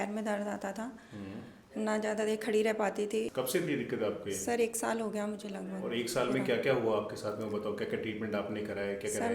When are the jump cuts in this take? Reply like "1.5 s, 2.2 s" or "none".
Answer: none